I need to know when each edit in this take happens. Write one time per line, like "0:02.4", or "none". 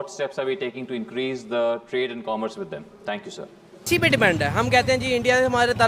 0:03.9

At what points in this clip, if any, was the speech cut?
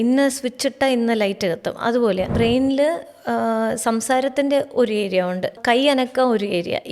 0:02.3
0:05.6

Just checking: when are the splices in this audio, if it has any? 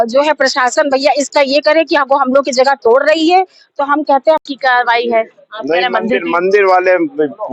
0:04.4

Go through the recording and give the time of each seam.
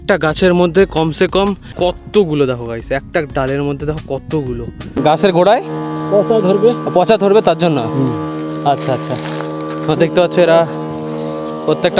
0:01.7
0:05.0

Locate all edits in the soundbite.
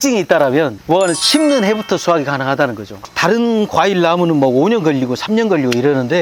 0:02.9

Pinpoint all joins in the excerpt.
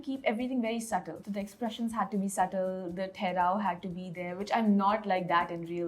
0:01.2

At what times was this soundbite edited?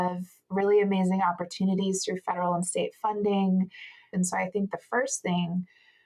0:04.0

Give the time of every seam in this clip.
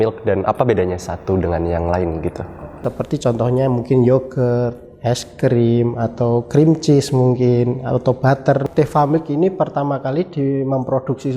0:02.6
0:08.6

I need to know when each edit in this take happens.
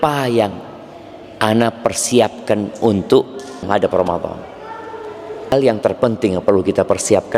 0:03.6
0:05.5

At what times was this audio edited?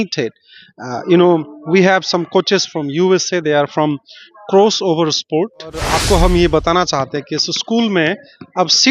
0:05.9

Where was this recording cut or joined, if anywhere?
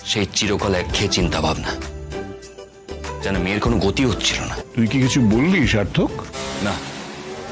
0:04.6

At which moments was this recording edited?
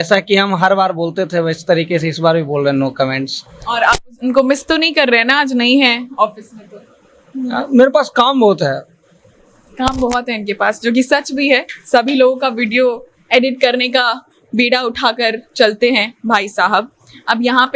none

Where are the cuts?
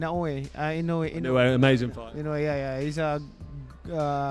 none

